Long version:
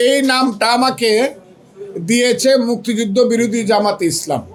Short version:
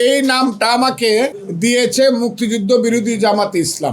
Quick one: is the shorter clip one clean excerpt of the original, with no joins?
no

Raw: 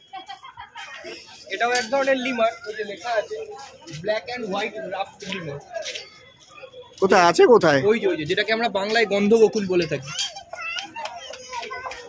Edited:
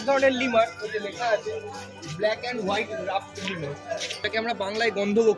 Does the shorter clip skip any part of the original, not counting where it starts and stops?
yes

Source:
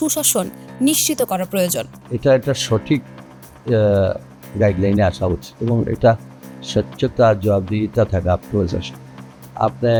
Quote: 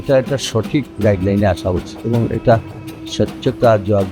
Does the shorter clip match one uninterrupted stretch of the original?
no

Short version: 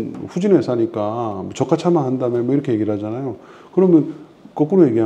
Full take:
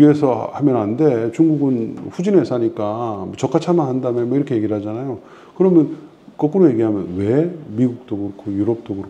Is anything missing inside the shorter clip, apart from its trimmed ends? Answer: no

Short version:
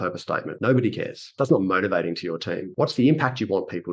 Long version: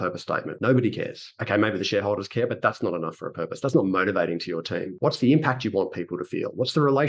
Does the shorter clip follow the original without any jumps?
no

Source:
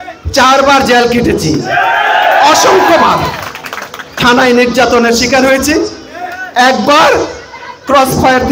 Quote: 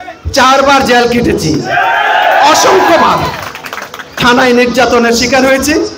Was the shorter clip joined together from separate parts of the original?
no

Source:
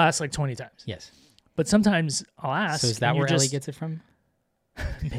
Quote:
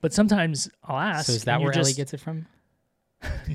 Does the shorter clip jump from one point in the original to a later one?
no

